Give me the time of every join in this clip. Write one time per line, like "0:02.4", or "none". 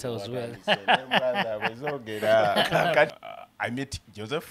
0:03.2